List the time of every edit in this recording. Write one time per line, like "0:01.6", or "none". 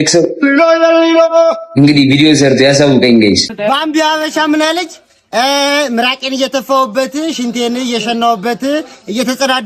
0:03.5

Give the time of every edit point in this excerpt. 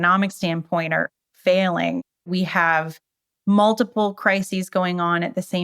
0:02.1

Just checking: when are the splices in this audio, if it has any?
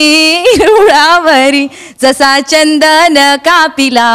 0:01.8

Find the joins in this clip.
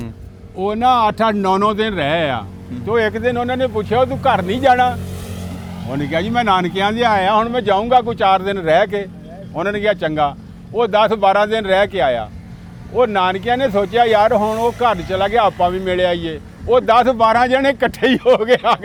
none

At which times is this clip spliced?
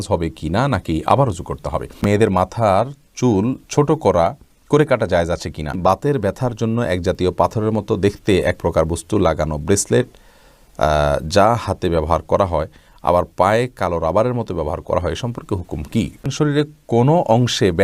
0:02.0
0:05.8
0:16.3

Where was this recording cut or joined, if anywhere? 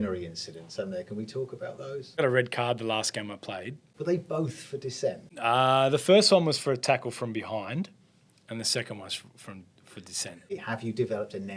0:02.2
0:03.8
0:10.5

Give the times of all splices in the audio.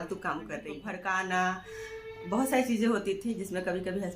0:01.2

